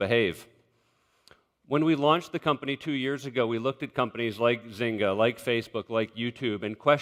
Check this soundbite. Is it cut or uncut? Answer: uncut